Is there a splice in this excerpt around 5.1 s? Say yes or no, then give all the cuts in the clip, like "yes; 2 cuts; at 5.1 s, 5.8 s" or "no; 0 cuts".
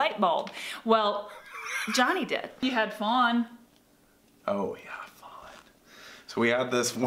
no; 1 cut; at 2.6 s